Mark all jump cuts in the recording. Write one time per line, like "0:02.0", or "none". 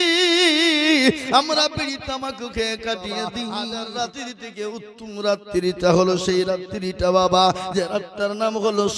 0:03.6